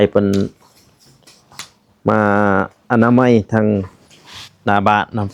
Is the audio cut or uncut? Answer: uncut